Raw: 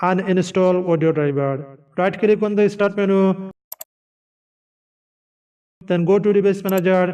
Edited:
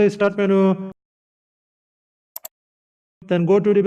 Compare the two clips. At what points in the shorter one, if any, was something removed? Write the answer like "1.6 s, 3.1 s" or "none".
none